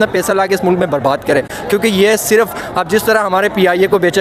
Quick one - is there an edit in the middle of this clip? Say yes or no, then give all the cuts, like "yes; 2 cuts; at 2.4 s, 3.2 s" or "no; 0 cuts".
no; 0 cuts